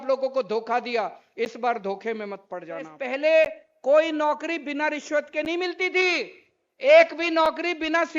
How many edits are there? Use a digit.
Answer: 1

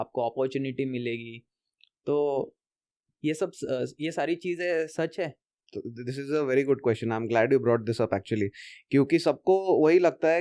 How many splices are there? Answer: 0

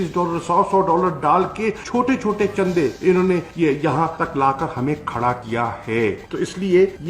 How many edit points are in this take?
1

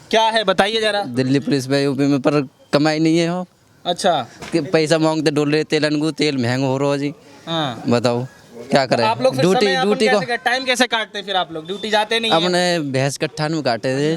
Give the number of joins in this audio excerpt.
0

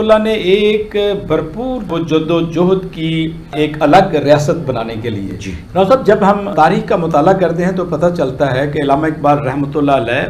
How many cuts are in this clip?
0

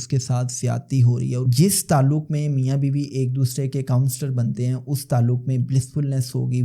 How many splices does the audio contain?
1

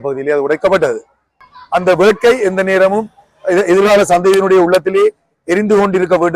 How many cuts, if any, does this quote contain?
1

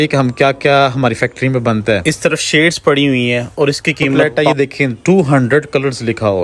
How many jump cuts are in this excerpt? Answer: 2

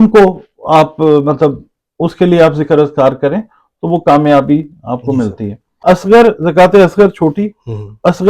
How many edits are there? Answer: 1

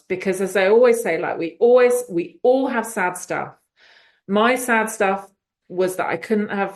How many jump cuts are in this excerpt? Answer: 0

